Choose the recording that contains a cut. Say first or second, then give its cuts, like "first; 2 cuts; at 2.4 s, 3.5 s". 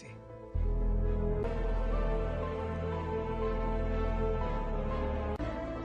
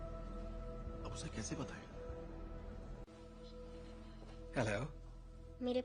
first; 1 cut; at 1.4 s